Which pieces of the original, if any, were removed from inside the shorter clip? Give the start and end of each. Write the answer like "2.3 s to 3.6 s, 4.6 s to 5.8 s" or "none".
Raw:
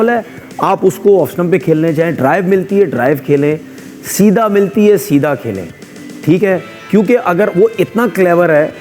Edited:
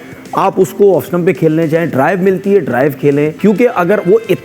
3.6 s to 6.8 s